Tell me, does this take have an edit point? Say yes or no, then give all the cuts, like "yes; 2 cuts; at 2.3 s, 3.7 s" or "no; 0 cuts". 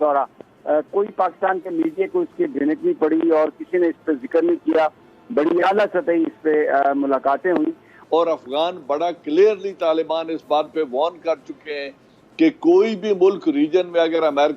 yes; 1 cut; at 7.9 s